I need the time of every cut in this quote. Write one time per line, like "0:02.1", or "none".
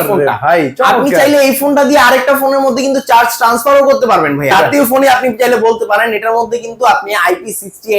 0:04.5

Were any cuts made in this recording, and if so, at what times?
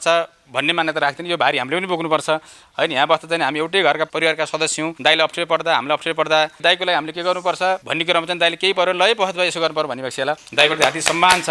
0:06.6
0:10.5

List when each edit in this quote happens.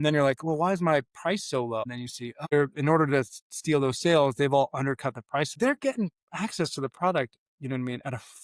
0:02.5
0:05.6

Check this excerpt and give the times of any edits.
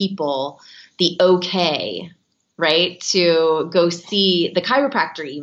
none

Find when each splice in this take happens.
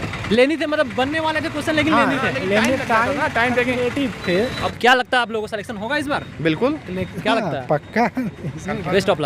0:04.7

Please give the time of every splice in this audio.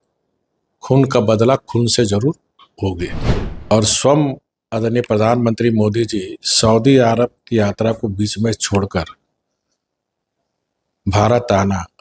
0:03.2

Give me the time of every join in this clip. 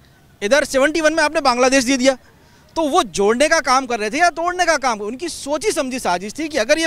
none

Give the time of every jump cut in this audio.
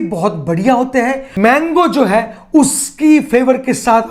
0:01.3

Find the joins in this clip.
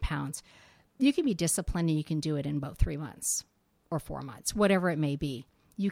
none

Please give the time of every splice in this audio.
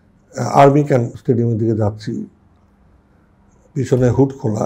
0:01.1

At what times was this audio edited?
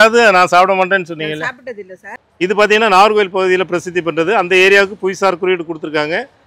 0:02.3

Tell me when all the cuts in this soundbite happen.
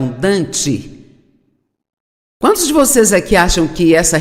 0:01.0

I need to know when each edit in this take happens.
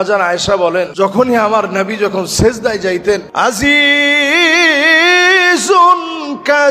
0:00.9
0:03.3

